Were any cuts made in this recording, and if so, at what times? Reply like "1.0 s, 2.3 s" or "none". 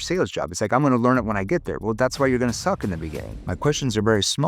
3.4 s